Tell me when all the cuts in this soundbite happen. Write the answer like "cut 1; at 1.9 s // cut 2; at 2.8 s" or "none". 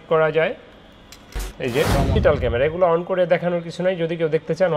cut 1; at 2.1 s